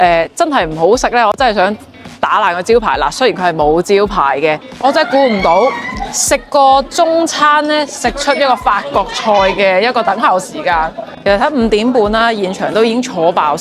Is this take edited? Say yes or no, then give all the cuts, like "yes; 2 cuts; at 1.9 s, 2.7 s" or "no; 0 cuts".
yes; 2 cuts; at 4.7 s, 11.1 s